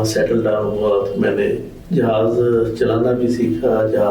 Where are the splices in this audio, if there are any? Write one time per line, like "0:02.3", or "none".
0:01.7